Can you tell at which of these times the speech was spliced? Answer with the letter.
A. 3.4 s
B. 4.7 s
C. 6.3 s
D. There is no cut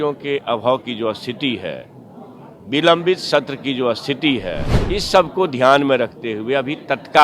B